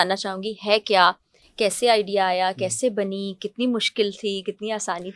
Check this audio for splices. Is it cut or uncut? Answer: uncut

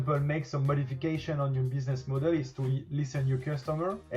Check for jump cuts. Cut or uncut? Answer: uncut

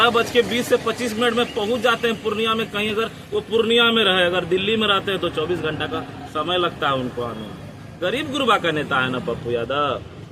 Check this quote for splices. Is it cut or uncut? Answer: uncut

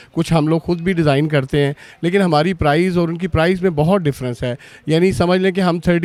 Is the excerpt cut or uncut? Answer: uncut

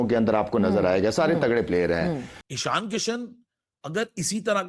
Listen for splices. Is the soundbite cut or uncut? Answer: cut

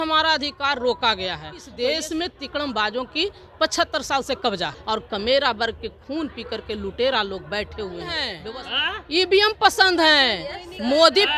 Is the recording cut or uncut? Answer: cut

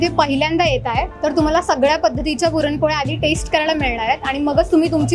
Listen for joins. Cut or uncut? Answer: uncut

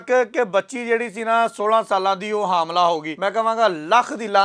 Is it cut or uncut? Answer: cut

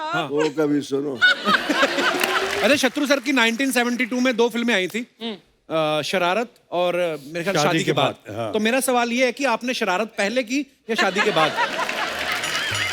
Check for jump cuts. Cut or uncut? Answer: cut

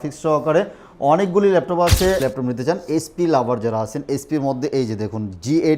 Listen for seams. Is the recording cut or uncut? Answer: cut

